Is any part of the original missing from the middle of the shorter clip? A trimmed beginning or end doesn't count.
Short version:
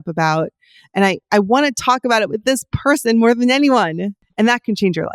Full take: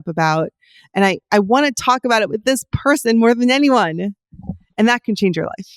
yes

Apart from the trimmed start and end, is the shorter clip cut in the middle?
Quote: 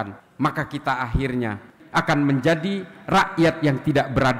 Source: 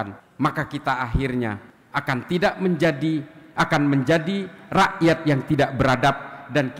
yes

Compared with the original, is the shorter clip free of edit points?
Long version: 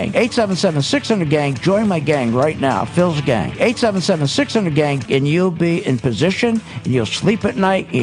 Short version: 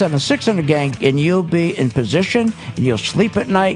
no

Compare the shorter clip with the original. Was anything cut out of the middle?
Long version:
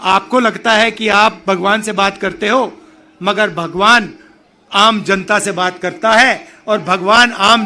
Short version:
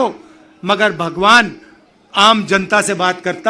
no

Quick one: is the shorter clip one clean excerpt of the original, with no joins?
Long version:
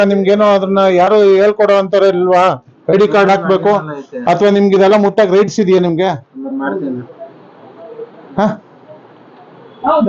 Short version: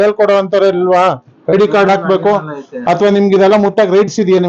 yes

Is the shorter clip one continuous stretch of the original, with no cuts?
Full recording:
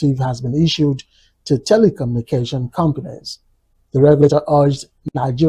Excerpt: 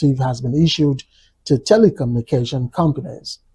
yes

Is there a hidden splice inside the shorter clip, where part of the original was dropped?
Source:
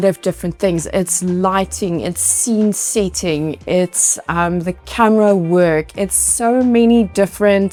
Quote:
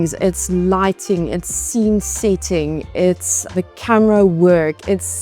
yes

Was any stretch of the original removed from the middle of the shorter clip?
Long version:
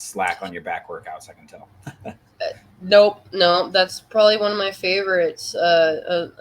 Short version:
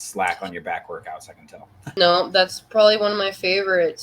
yes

